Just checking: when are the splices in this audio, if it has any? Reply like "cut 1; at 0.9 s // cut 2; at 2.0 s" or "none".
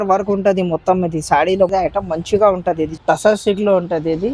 cut 1; at 1.7 s // cut 2; at 3.0 s